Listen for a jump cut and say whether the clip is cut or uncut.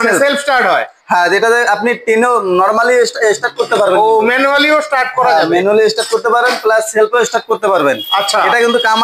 uncut